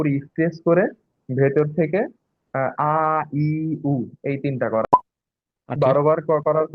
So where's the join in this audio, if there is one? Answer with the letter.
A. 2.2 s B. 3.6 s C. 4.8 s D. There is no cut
C